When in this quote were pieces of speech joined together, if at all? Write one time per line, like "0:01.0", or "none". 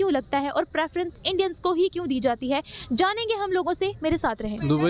none